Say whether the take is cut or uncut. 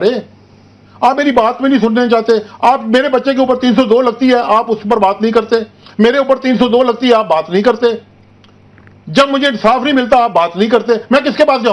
uncut